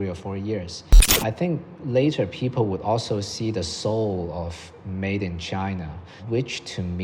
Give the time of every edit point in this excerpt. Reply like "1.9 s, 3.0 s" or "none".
1.1 s